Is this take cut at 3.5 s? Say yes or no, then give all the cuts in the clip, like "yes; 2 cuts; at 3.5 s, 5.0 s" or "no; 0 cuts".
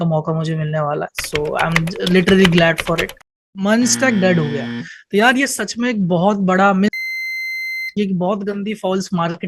yes; 1 cut; at 3.5 s